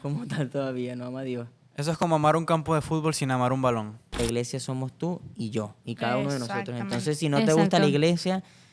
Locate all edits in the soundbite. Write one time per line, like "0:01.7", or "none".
0:04.2